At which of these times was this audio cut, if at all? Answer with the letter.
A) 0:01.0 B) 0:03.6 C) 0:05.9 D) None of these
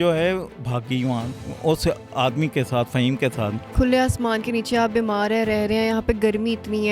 B